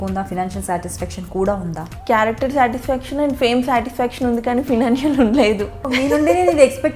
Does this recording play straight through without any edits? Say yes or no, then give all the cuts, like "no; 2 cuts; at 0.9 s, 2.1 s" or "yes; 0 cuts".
no; 2 cuts; at 1.9 s, 5.9 s